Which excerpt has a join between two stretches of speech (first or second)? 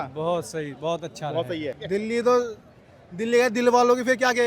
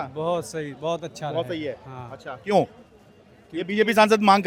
first